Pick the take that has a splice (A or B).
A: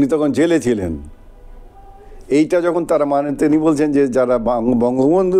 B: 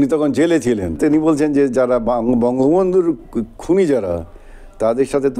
B